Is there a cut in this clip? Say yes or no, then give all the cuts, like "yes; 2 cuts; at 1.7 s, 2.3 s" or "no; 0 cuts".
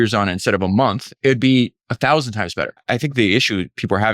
yes; 3 cuts; at 1.1 s, 1.8 s, 2.8 s